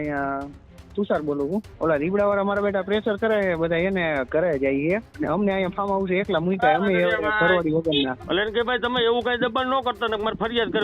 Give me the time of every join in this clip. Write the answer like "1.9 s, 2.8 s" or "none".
1.7 s, 5.1 s, 8.2 s